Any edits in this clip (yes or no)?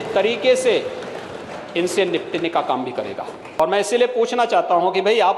yes